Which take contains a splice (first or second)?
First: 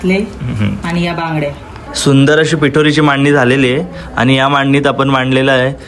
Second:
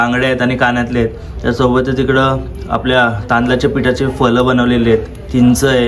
first